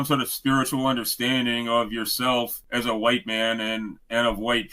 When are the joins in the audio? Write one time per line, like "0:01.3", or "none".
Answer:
0:02.6